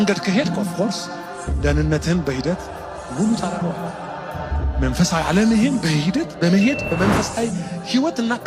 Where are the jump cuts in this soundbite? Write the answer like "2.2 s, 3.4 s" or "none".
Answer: none